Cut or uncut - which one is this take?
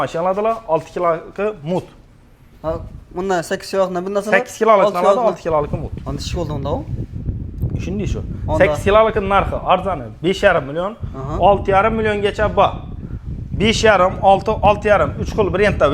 uncut